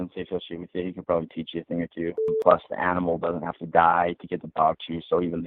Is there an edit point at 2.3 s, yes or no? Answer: yes